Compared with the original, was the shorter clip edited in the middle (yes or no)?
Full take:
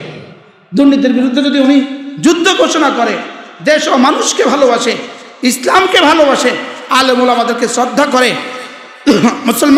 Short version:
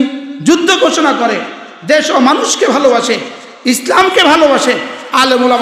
no